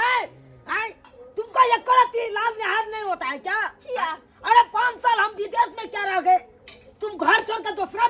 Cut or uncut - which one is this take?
uncut